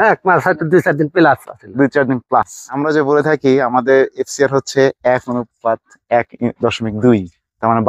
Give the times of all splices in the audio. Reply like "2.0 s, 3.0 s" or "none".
2.6 s